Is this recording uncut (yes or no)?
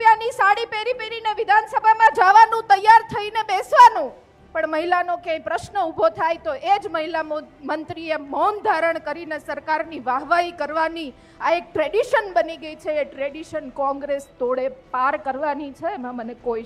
yes